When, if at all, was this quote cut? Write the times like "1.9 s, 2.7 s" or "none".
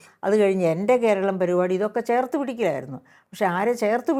none